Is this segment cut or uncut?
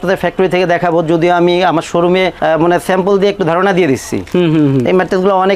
uncut